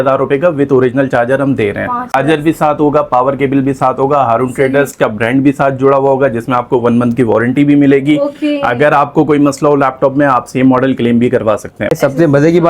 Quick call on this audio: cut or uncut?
cut